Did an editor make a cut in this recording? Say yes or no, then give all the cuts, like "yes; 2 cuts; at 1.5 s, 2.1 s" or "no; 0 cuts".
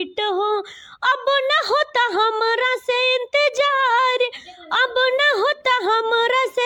no; 0 cuts